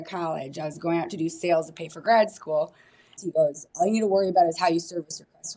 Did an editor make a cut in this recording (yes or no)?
yes